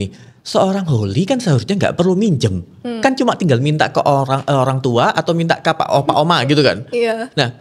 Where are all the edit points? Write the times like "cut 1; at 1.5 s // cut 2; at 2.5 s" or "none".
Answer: none